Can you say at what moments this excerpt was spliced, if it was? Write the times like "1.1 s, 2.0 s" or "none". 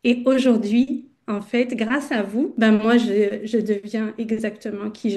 2.5 s